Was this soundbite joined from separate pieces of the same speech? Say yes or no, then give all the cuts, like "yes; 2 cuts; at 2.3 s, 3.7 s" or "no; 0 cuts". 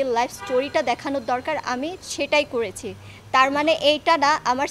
no; 0 cuts